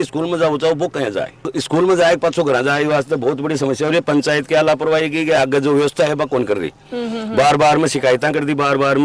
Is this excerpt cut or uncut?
uncut